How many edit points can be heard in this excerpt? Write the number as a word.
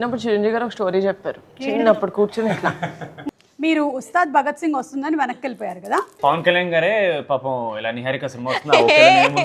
two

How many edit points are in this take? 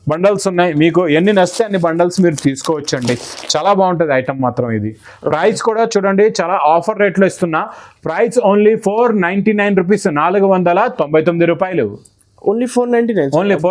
zero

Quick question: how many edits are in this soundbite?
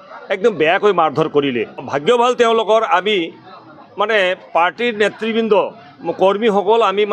one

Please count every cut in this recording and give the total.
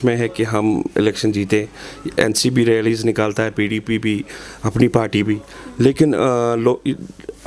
zero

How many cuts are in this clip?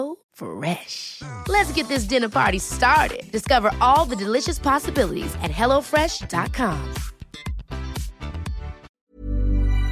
one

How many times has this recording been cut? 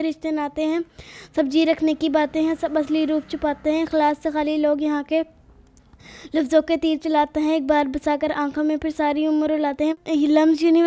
one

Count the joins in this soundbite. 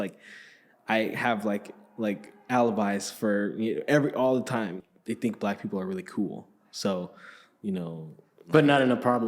one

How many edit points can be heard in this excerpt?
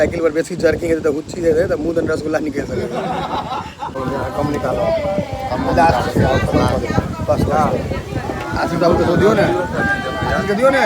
one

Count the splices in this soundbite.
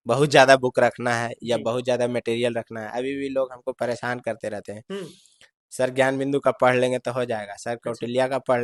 zero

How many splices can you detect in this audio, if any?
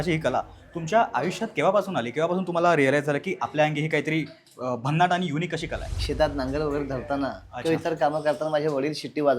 one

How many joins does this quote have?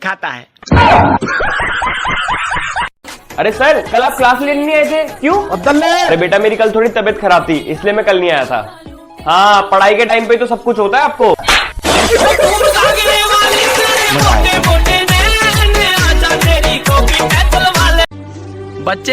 one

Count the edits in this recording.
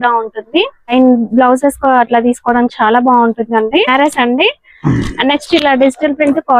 two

